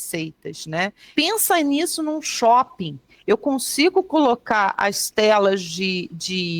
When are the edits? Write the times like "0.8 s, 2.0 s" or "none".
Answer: 1.1 s